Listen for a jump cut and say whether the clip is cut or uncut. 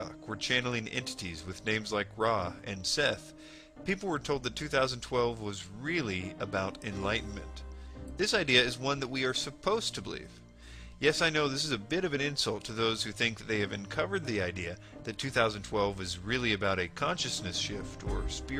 uncut